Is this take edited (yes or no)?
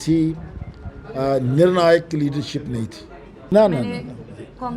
yes